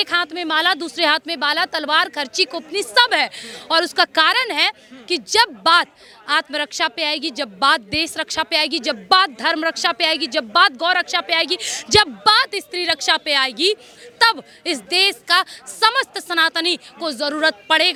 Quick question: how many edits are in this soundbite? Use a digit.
0